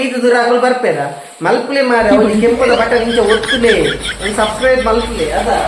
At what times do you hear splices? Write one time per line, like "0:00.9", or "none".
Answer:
none